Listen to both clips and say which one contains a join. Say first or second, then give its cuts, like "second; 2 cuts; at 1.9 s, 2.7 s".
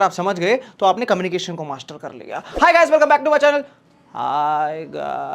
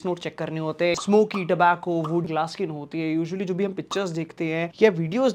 second; 2 cuts; at 1.0 s, 2.2 s